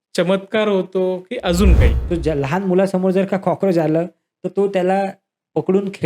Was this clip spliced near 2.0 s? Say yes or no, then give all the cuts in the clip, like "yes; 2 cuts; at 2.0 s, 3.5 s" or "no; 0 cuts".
yes; 1 cut; at 2.0 s